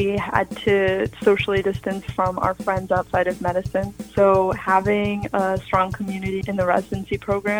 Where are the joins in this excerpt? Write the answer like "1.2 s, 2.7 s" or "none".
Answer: none